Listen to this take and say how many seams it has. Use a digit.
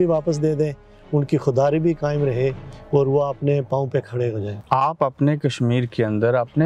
1